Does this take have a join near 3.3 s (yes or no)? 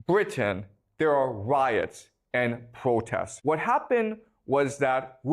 yes